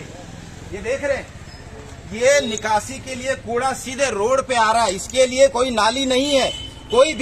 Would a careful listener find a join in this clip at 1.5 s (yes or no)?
no